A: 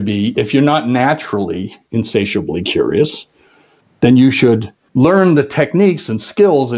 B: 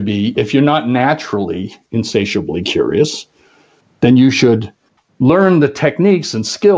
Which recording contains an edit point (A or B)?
A